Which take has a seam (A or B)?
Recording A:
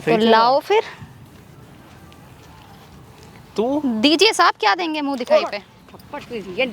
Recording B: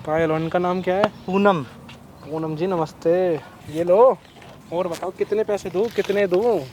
B